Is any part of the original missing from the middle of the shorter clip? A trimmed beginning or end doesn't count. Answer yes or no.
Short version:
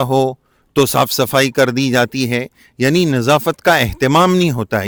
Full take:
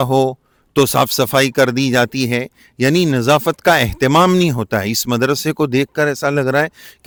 no